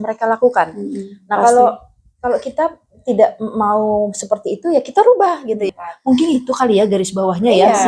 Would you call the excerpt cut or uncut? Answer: cut